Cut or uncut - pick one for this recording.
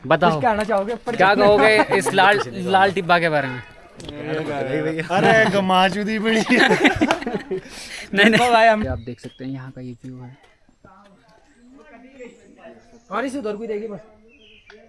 cut